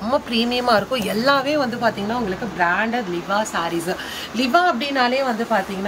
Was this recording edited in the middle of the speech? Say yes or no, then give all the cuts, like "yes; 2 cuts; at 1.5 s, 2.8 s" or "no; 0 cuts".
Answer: no; 0 cuts